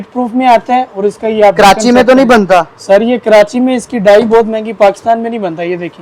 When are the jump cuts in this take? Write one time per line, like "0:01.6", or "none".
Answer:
none